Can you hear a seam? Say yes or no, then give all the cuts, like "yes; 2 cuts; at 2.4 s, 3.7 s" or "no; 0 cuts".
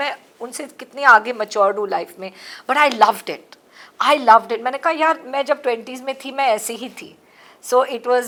no; 0 cuts